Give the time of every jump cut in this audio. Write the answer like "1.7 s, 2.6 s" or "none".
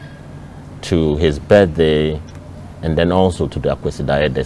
none